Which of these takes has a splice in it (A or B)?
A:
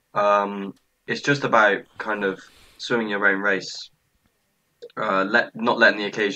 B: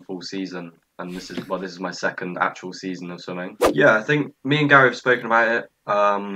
B